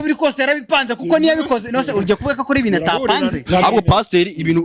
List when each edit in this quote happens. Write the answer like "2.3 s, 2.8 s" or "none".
3.4 s